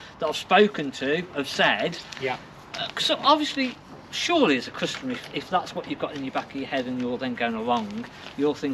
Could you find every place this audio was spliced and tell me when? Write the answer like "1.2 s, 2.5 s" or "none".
none